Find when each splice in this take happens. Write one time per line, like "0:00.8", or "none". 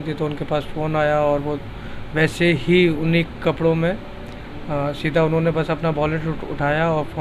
none